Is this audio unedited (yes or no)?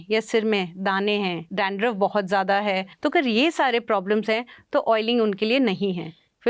no